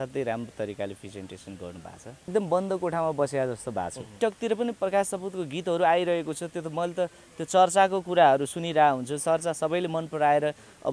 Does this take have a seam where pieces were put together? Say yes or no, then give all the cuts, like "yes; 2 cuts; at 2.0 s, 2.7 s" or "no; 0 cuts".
yes; 2 cuts; at 2.3 s, 4.1 s